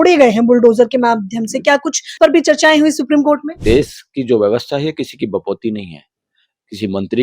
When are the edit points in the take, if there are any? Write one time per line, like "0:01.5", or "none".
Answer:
0:02.1
0:03.5

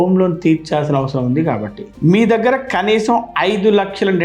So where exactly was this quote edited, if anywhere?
0:01.9

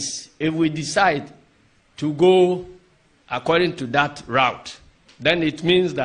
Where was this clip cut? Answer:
none

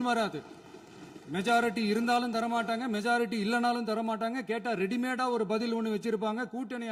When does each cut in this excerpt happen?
none

